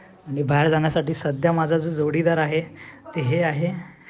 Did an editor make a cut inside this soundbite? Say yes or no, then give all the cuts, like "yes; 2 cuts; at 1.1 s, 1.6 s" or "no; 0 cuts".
no; 0 cuts